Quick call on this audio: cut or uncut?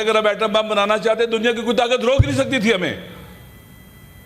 uncut